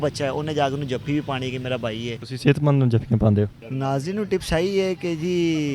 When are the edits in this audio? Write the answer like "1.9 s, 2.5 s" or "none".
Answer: 2.2 s, 3.6 s